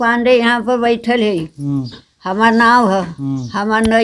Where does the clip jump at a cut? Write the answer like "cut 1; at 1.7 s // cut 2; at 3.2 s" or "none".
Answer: none